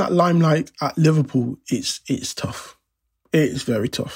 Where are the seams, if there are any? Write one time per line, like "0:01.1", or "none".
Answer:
none

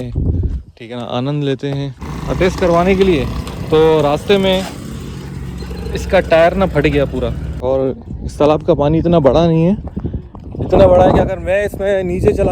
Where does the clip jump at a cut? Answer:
0:02.1
0:07.5

